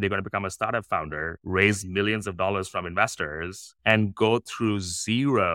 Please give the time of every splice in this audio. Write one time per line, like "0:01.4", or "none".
none